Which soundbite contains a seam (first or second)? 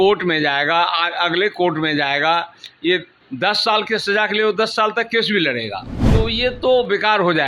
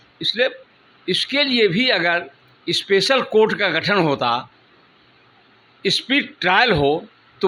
first